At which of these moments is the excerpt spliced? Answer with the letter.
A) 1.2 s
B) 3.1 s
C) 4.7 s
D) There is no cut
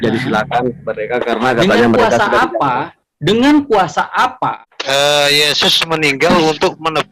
C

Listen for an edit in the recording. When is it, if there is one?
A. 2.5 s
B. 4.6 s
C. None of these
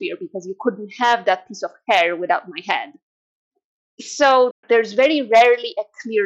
B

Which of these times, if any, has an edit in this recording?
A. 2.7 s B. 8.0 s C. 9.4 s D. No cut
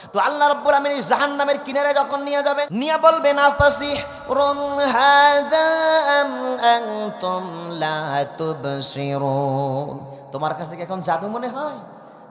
A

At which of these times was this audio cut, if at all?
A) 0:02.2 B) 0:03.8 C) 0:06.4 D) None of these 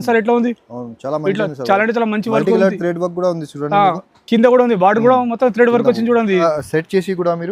C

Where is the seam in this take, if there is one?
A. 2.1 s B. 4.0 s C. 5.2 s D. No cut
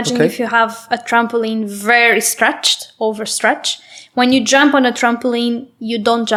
D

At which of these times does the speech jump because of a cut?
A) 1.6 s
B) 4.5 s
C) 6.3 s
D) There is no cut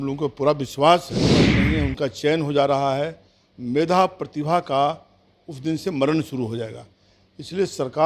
A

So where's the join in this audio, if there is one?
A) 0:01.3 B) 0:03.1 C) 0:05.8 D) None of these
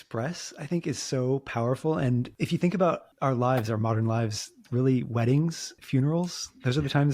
B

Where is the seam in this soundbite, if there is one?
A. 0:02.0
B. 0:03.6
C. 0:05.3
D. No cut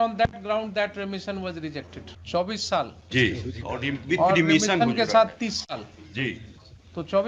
A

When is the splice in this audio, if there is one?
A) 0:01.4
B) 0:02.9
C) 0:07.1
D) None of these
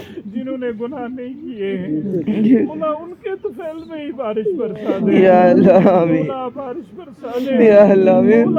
D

